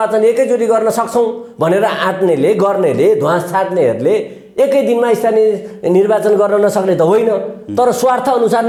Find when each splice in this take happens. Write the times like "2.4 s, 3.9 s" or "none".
none